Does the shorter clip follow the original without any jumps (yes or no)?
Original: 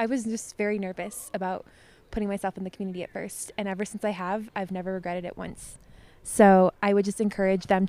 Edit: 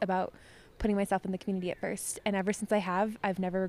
yes